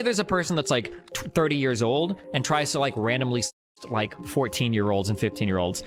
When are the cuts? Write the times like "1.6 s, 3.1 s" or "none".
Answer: none